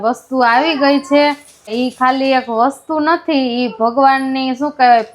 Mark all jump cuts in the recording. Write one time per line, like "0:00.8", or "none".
0:01.7